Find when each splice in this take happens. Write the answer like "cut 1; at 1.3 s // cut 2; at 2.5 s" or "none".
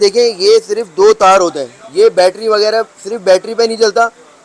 none